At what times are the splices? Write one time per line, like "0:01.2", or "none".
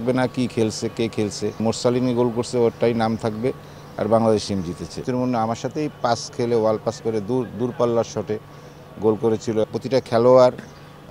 0:01.6
0:05.1
0:09.6